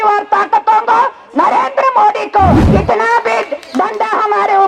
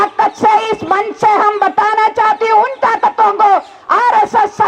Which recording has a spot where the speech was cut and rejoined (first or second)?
first